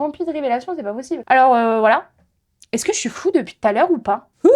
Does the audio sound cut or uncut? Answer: uncut